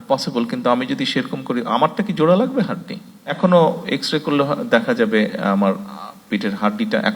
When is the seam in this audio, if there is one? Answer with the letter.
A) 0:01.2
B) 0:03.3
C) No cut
B